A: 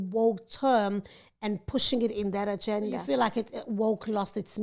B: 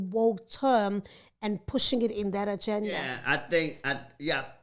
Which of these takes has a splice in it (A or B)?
A